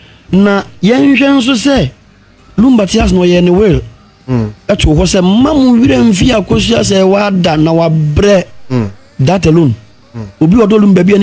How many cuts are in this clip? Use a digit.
0